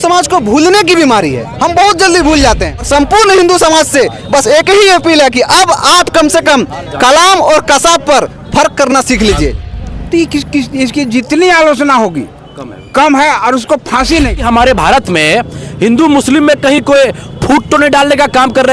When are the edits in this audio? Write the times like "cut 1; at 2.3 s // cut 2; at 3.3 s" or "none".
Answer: cut 1; at 2.9 s // cut 2; at 9.7 s // cut 3; at 14.4 s